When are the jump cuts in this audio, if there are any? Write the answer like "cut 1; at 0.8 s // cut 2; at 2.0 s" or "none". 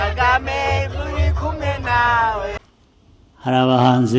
cut 1; at 2.6 s